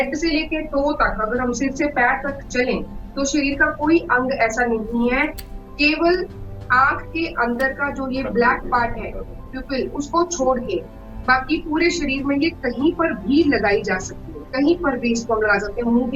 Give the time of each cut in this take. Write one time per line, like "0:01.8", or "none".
none